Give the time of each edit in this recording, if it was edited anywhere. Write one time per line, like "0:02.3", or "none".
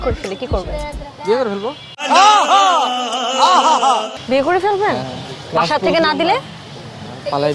none